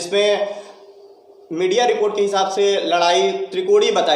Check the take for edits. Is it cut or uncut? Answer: uncut